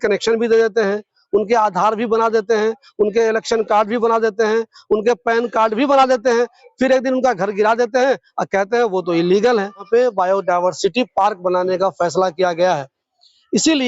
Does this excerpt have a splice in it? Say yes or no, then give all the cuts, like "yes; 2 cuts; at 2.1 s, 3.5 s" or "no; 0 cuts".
yes; 1 cut; at 9.8 s